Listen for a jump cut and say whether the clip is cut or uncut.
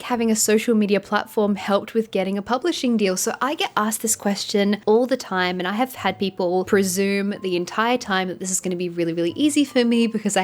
uncut